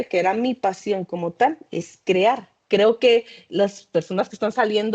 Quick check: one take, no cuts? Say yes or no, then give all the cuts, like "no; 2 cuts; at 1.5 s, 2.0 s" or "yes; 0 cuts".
no; 1 cut; at 2.5 s